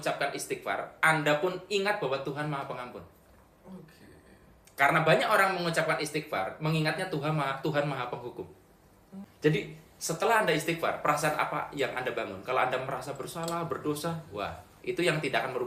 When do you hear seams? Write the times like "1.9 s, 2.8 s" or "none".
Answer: 9.3 s